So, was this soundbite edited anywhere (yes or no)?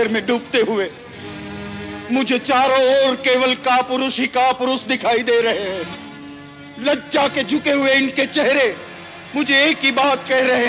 no